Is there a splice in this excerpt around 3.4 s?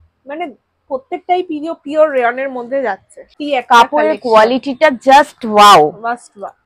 yes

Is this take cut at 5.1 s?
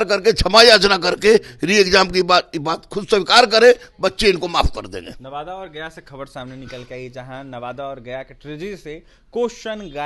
no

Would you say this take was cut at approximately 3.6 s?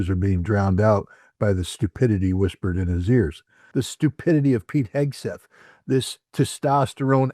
yes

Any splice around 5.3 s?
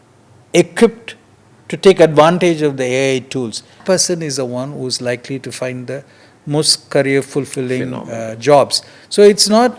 no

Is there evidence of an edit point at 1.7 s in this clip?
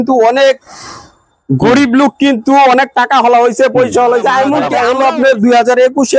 no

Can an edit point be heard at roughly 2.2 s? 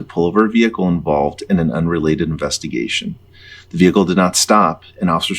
no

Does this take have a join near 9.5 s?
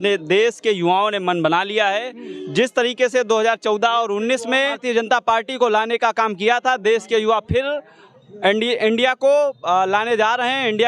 no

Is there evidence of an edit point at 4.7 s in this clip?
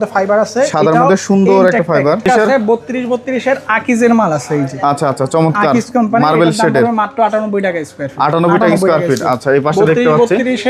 no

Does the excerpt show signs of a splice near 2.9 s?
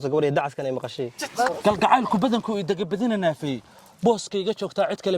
no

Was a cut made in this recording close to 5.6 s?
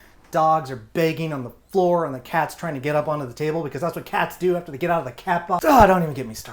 yes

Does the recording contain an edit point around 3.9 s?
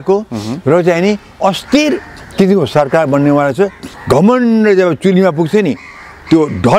yes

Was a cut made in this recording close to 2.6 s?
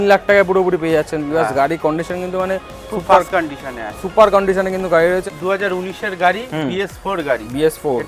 no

